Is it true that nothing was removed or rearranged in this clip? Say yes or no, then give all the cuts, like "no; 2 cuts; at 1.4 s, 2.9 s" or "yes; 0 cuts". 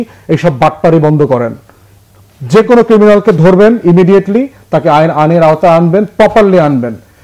yes; 0 cuts